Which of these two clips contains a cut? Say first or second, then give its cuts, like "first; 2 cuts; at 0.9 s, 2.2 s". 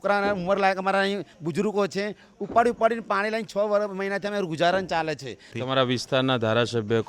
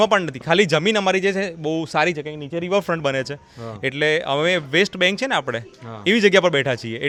first; 1 cut; at 5.5 s